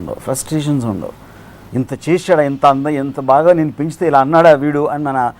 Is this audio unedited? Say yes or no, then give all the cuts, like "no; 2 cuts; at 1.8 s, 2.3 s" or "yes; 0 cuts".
yes; 0 cuts